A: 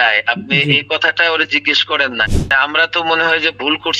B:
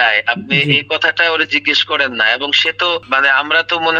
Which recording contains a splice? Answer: A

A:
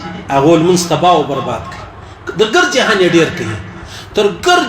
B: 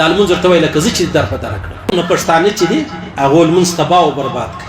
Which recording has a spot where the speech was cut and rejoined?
B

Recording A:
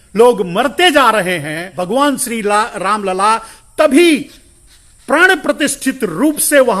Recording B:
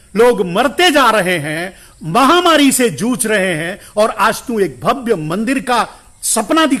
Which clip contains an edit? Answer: A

